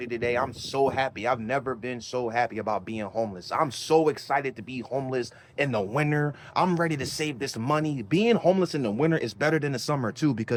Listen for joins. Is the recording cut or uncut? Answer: uncut